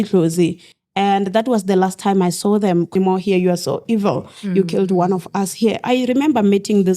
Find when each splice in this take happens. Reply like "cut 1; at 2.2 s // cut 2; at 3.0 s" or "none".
cut 1; at 3.0 s

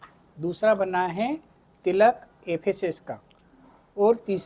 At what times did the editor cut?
none

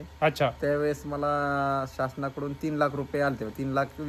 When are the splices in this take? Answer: none

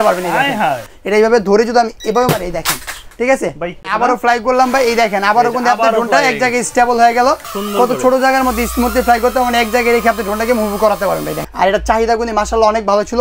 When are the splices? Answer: cut 1; at 0.9 s // cut 2; at 3.9 s // cut 3; at 7.5 s // cut 4; at 11.4 s

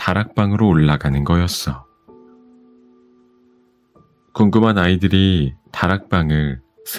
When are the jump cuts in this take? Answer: cut 1; at 1.9 s // cut 2; at 3.7 s

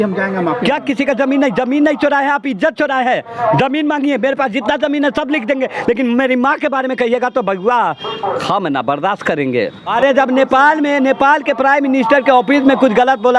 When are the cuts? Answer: none

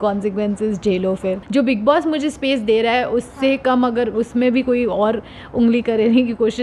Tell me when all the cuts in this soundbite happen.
cut 1; at 1.4 s

